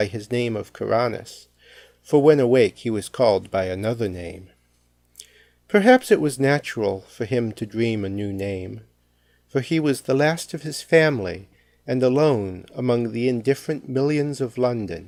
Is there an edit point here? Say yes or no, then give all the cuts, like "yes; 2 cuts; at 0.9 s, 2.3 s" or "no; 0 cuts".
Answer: no; 0 cuts